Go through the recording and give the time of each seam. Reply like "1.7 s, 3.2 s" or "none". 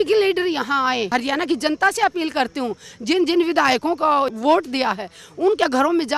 1.1 s, 4.3 s

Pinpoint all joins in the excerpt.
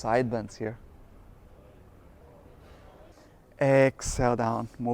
3.1 s

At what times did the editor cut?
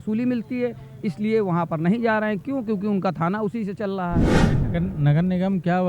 4.4 s

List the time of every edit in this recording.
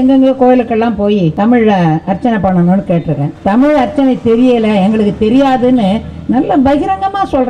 1.3 s, 3.3 s

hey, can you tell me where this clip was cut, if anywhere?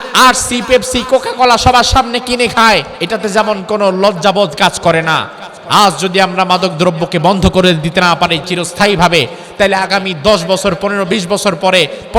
2.9 s

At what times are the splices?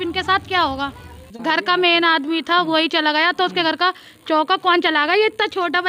1.3 s

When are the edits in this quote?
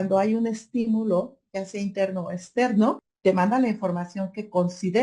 3.1 s

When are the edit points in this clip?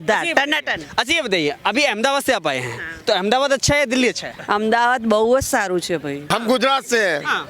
4.3 s, 6.2 s

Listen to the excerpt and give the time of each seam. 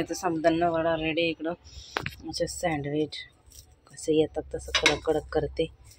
none

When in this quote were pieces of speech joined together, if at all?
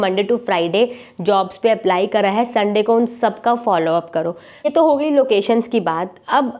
4.6 s

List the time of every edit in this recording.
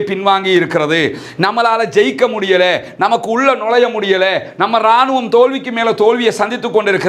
none

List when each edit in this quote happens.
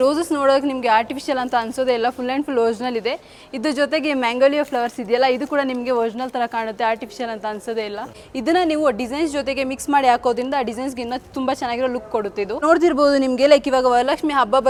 none

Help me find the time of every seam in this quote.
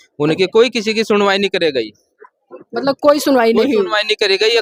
none

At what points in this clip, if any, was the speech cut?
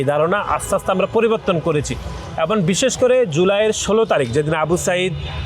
none

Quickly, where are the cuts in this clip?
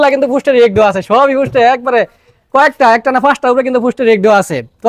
none

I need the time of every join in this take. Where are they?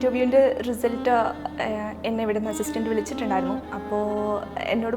none

